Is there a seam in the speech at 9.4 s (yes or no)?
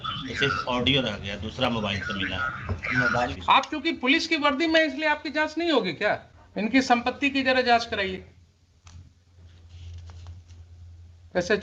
no